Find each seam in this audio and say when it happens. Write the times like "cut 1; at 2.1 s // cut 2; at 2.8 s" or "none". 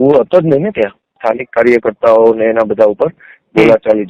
cut 1; at 1.2 s